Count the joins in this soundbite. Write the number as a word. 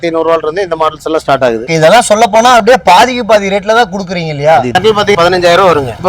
one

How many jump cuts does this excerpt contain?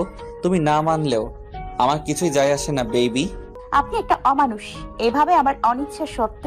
one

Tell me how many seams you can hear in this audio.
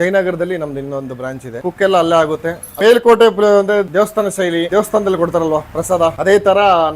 one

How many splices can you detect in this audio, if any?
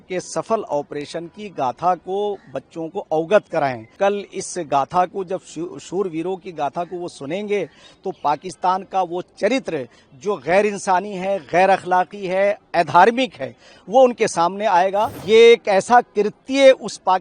two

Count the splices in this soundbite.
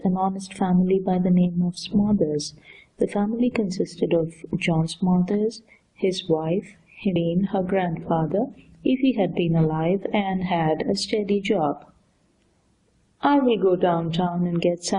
zero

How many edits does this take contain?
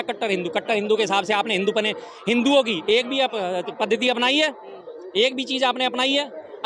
zero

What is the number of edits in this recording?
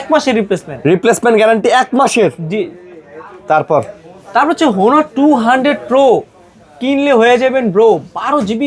zero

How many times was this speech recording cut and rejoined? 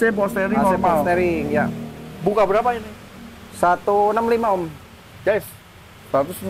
zero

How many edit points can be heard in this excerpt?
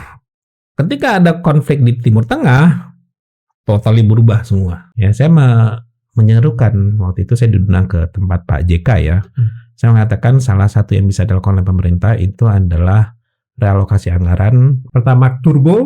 two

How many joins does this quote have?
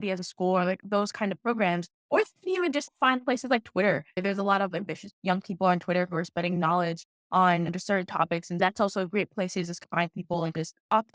one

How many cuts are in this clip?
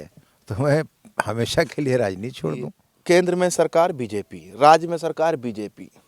one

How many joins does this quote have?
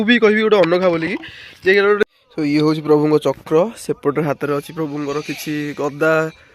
one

